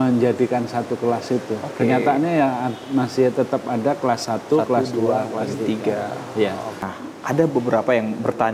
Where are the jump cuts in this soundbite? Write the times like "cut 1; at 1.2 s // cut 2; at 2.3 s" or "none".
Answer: cut 1; at 6.8 s